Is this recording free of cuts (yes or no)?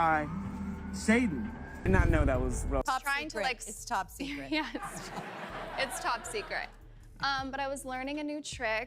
no